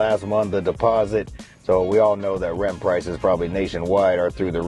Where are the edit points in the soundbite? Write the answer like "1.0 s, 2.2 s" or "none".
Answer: none